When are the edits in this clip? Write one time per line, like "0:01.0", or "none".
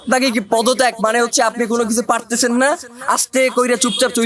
none